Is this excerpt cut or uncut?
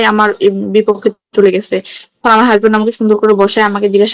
uncut